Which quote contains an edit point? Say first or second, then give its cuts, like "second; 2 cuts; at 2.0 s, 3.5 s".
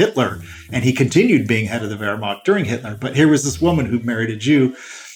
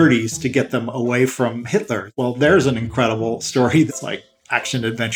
second; 2 cuts; at 2.1 s, 3.9 s